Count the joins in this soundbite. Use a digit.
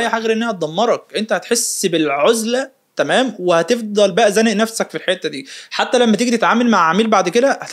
0